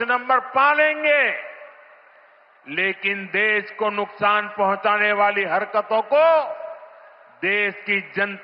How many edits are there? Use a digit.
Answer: 0